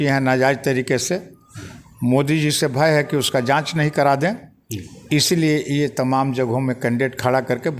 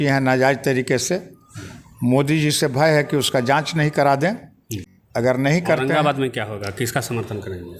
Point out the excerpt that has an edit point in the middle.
second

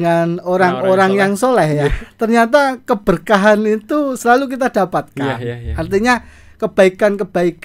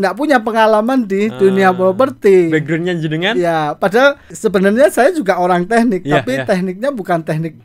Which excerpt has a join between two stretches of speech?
second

